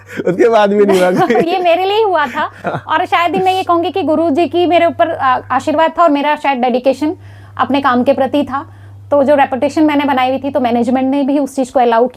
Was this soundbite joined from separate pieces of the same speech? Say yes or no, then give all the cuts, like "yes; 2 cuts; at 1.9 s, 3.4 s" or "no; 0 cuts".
no; 0 cuts